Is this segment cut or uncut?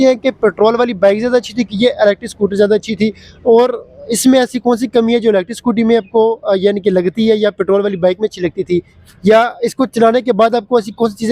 uncut